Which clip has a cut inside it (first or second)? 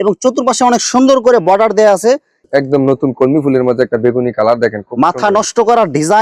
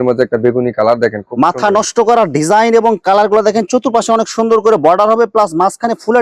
first